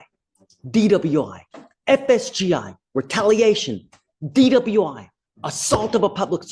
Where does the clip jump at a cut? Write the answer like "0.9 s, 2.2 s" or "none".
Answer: none

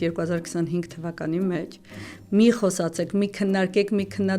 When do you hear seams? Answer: none

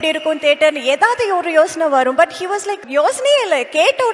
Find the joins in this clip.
2.8 s

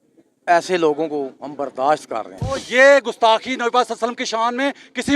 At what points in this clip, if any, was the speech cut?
2.6 s

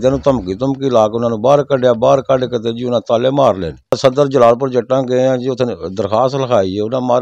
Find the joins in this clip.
4.0 s

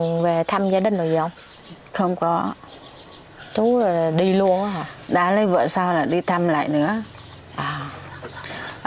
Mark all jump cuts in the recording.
none

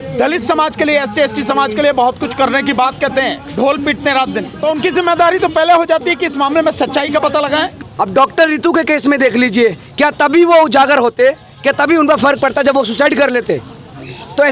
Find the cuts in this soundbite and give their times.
4.5 s, 7.8 s

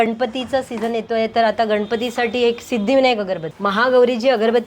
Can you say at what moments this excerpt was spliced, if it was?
3.5 s

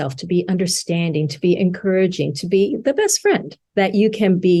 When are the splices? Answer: none

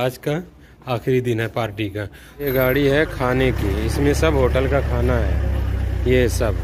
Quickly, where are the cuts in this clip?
2.4 s

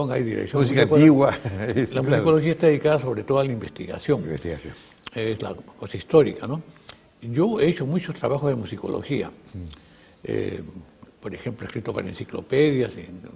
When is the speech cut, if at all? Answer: 9.1 s

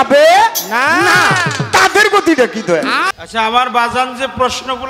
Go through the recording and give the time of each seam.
3.0 s

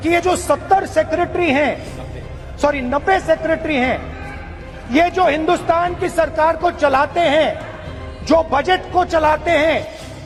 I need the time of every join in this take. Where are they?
none

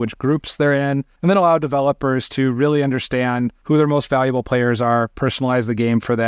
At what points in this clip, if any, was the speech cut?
1.1 s, 3.6 s

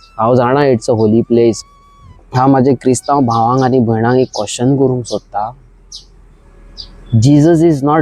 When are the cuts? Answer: 1.6 s

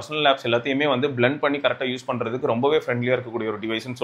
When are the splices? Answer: none

